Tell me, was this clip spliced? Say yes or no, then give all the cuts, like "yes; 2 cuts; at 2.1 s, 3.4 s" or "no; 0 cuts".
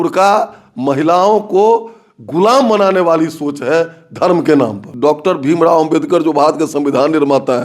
yes; 1 cut; at 4.8 s